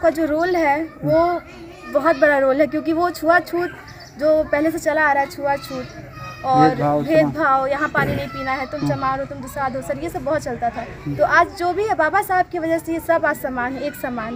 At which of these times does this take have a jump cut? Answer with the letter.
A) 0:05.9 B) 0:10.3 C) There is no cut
C